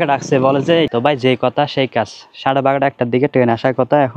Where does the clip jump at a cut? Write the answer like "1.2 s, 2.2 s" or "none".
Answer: 0.9 s